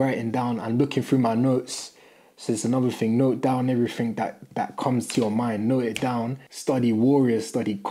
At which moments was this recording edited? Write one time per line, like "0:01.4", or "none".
0:06.5